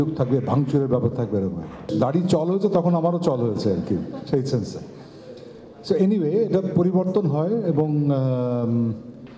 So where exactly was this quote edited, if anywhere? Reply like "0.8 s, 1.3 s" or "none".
none

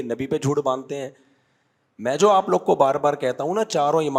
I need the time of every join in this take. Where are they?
none

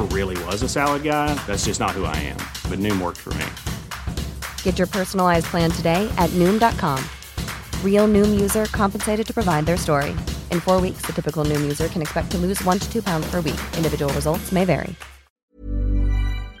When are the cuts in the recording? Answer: 15.4 s

